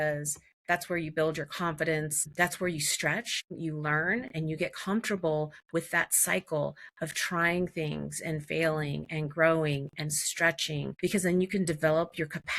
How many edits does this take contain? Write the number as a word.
three